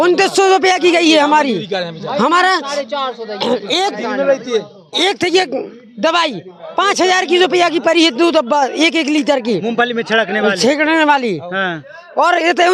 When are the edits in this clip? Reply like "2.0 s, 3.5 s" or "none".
none